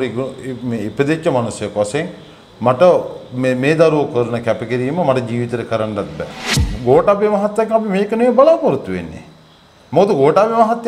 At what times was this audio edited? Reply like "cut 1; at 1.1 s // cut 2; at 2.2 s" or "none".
cut 1; at 6.6 s